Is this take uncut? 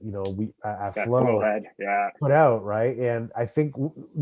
yes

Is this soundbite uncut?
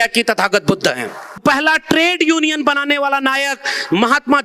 no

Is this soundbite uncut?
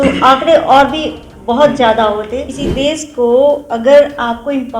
no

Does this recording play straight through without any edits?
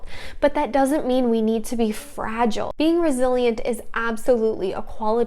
no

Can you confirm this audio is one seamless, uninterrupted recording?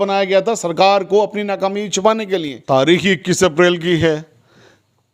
no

